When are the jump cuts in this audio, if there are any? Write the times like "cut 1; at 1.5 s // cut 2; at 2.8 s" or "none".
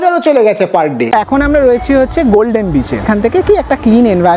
cut 1; at 1.0 s // cut 2; at 3.0 s